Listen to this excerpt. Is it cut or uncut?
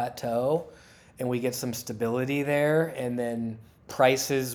uncut